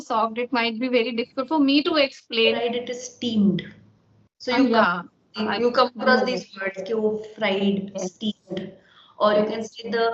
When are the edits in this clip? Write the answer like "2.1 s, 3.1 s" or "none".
2.6 s